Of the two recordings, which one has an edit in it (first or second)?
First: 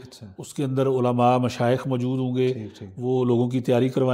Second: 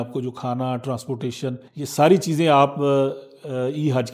second